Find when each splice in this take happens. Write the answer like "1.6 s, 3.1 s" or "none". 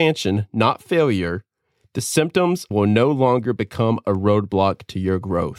2.7 s